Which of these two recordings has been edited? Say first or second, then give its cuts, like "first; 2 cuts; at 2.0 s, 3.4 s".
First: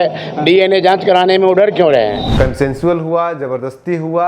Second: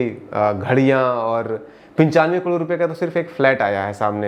first; 1 cut; at 2.2 s